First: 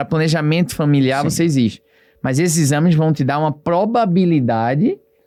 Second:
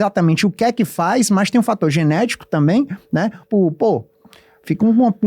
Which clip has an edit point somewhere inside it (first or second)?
second